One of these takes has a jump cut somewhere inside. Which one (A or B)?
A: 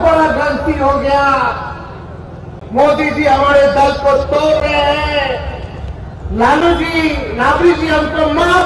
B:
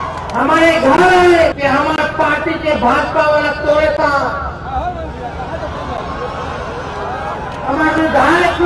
B